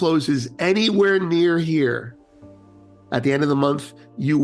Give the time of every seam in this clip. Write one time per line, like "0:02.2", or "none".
none